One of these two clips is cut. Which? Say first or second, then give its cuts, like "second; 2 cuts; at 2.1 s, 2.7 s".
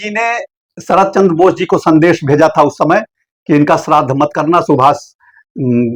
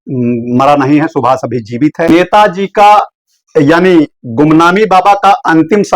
second; 1 cut; at 2.1 s